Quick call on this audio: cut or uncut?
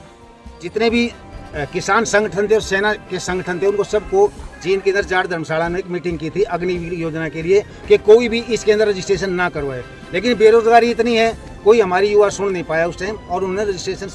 uncut